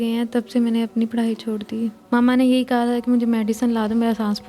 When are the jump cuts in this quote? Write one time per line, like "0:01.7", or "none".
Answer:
0:02.0